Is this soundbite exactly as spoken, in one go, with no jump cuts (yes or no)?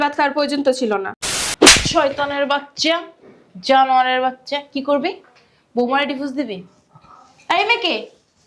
no